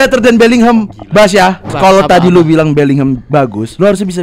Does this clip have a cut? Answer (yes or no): yes